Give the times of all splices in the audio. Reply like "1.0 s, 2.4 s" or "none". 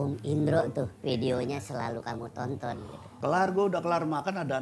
0.9 s, 3.0 s

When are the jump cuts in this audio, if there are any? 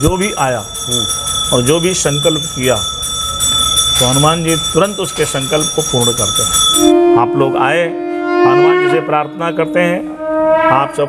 6.8 s

